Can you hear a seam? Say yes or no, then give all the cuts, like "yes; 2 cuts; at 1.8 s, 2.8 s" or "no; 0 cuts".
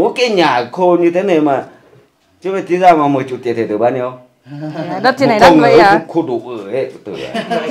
no; 0 cuts